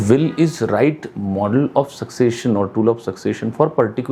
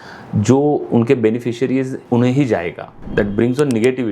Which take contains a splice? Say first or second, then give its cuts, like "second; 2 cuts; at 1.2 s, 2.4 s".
second; 2 cuts; at 2.0 s, 3.0 s